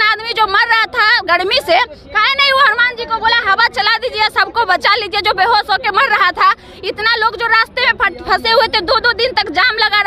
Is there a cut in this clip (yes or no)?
no